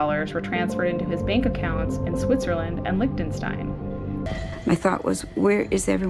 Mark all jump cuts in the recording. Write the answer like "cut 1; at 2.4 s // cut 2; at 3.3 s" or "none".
cut 1; at 4.4 s